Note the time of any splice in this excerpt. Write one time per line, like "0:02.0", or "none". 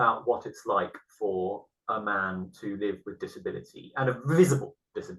none